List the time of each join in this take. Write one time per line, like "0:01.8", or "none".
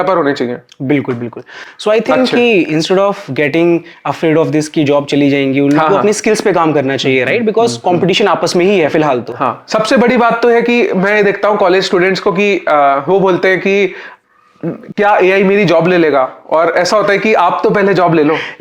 none